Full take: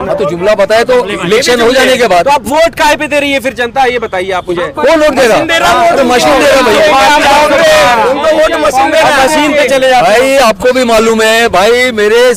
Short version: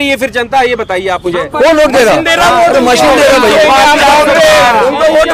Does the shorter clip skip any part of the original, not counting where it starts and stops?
no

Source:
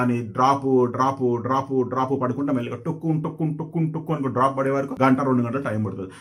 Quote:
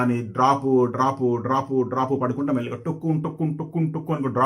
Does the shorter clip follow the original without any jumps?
yes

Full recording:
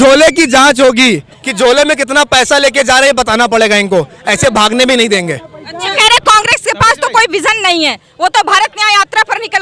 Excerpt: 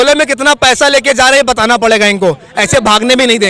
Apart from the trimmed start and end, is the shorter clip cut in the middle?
no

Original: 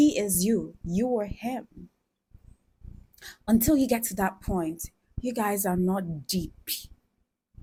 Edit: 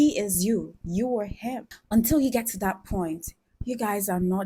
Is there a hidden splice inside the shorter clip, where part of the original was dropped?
yes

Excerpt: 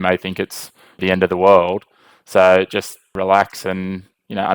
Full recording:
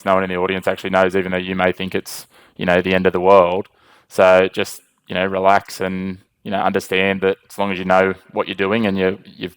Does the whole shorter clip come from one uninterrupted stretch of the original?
no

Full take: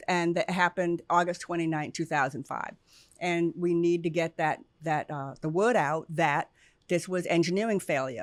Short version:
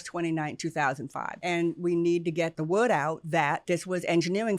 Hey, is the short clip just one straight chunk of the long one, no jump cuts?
no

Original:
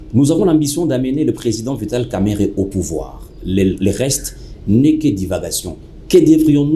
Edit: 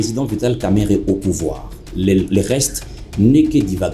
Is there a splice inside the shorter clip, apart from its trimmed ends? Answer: no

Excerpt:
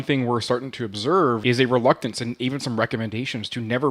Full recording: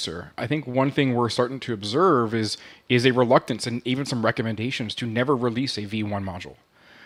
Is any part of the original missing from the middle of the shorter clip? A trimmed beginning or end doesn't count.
yes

